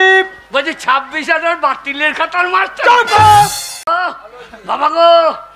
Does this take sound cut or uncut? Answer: cut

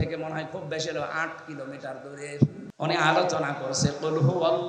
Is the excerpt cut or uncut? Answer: cut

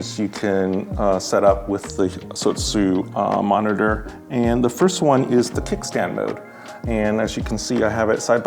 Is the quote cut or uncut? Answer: uncut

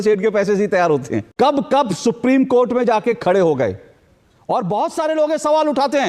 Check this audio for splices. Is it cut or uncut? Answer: cut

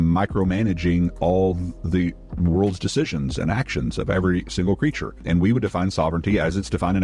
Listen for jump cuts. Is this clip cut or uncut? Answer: cut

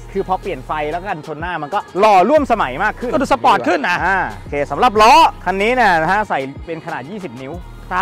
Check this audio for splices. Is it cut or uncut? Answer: uncut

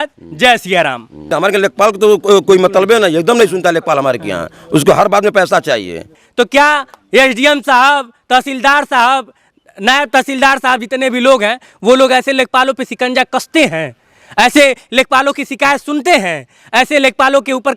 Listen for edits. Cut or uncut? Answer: cut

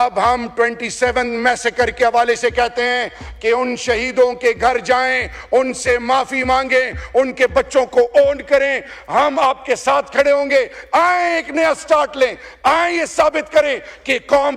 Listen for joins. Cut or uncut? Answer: uncut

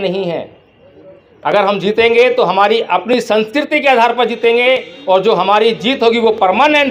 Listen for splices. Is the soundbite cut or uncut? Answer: uncut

